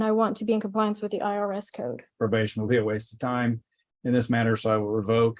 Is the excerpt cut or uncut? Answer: cut